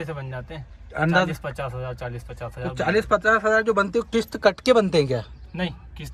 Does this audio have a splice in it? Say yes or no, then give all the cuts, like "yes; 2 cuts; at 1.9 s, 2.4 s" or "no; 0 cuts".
no; 0 cuts